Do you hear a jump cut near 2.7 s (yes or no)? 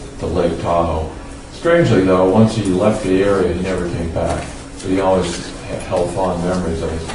no